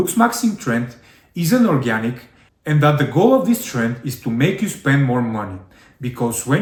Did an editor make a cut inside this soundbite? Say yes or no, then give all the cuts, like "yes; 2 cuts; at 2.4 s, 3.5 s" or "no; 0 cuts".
no; 0 cuts